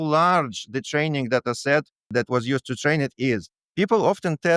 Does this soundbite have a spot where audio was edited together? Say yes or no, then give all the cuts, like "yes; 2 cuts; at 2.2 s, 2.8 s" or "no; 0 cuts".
yes; 2 cuts; at 2.1 s, 3.6 s